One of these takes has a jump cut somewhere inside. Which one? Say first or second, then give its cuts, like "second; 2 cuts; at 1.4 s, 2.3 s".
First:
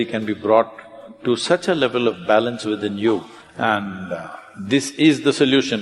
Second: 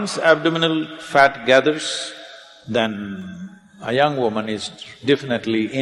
first; 1 cut; at 3.4 s